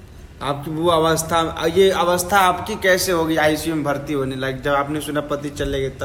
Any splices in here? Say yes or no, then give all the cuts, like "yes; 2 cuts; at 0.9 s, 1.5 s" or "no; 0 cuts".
no; 0 cuts